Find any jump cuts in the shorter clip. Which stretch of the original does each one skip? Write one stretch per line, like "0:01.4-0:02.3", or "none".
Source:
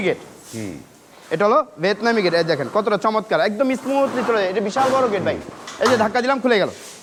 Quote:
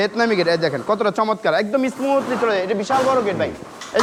none